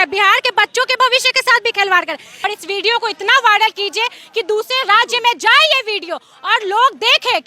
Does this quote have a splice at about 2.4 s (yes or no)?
yes